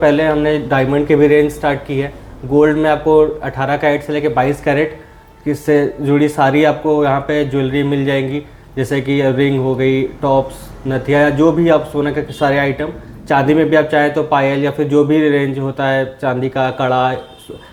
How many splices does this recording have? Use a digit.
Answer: 0